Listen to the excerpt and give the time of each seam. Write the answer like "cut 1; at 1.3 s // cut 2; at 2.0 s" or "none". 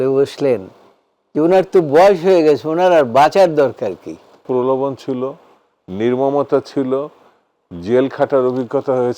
cut 1; at 4.4 s